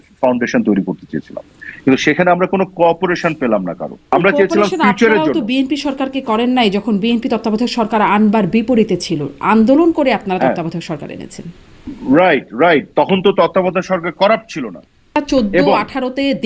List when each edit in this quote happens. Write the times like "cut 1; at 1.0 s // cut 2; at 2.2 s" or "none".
cut 1; at 4.1 s // cut 2; at 15.1 s